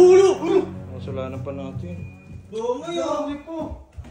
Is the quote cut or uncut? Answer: uncut